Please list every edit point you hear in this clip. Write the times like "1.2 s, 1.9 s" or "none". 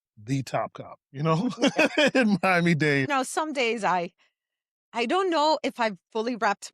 3.1 s